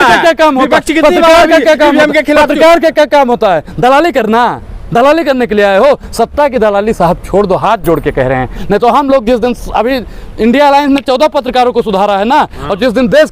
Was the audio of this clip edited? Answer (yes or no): no